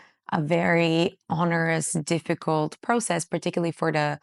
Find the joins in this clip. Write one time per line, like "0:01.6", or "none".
none